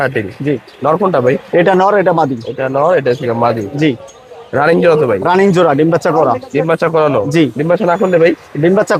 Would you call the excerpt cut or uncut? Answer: uncut